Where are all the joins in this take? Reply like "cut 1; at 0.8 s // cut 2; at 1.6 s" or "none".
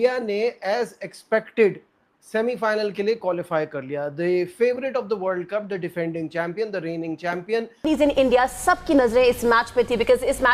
cut 1; at 7.8 s